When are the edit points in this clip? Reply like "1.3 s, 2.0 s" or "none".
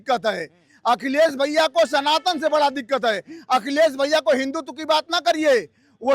none